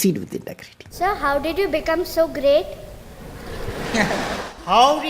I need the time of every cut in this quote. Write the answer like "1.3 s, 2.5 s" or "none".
0.9 s